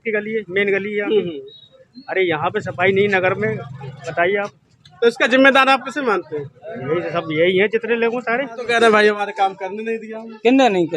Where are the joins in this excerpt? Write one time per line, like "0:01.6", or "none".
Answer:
0:08.6